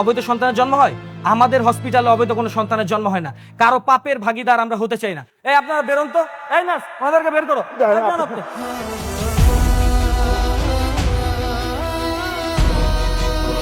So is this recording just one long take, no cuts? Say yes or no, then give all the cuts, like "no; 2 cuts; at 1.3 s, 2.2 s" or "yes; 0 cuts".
yes; 0 cuts